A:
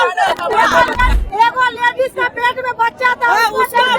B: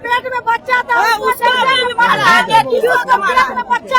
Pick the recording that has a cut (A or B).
A